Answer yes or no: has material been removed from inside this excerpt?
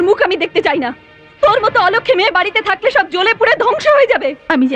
no